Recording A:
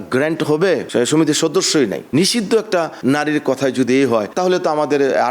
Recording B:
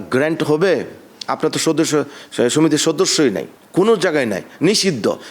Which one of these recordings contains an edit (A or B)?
A